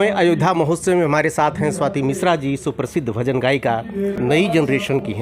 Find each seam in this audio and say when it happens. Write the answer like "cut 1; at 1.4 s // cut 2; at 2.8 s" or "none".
cut 1; at 4.2 s